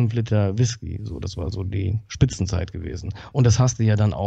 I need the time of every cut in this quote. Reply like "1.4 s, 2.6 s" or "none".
none